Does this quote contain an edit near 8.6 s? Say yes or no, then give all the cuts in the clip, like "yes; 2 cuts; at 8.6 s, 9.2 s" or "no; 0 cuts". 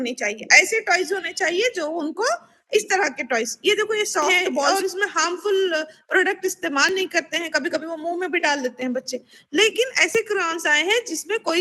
no; 1 cut; at 4.7 s